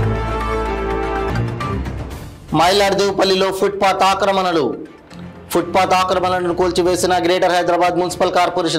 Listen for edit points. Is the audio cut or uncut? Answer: cut